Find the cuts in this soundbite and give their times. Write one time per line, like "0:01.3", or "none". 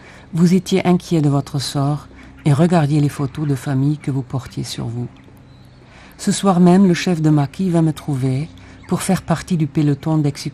none